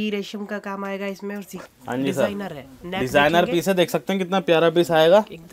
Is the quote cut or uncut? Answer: cut